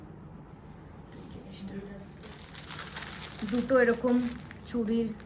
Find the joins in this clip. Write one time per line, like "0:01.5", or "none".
0:02.9